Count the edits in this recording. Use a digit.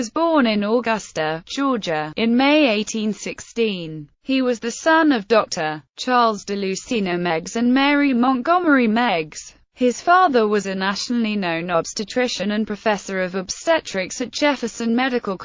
1